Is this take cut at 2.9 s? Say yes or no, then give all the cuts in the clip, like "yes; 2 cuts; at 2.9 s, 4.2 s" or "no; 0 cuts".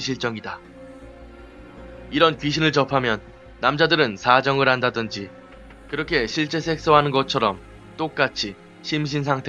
yes; 1 cut; at 2.9 s